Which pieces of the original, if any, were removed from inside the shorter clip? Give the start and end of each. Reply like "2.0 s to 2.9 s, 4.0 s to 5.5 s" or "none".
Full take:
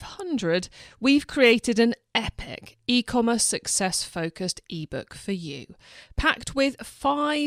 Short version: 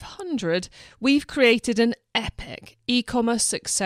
none